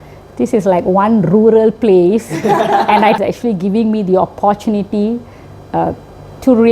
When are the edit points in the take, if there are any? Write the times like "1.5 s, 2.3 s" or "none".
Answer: 3.2 s